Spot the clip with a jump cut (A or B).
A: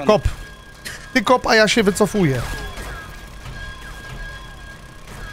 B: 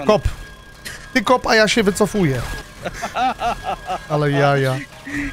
B